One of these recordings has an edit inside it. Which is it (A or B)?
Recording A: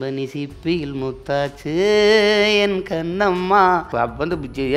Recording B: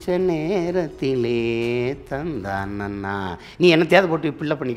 A